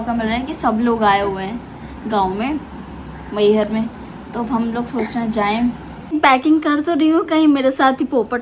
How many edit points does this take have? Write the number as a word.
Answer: one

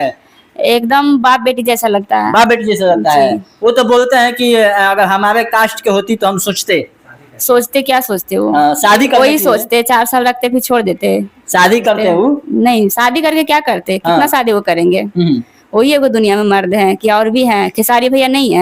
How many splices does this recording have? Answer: zero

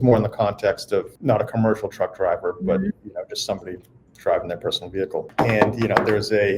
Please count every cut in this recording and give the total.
two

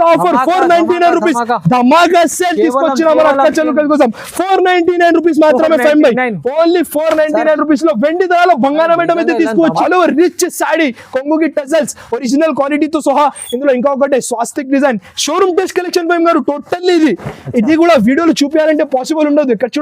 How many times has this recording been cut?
one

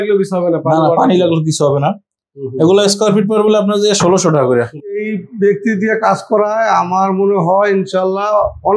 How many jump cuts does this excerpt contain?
one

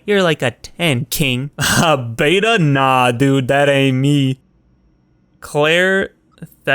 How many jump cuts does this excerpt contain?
one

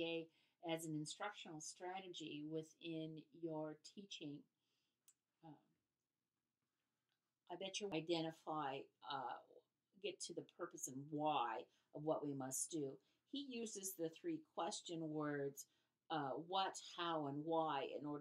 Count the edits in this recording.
one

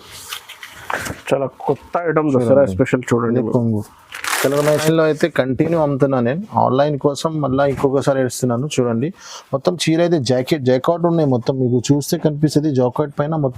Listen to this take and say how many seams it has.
one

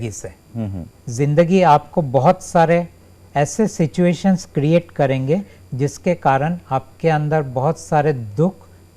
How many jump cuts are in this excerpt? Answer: one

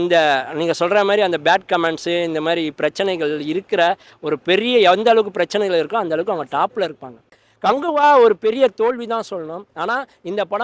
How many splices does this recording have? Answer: one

